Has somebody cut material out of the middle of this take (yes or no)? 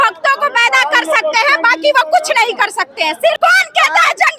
yes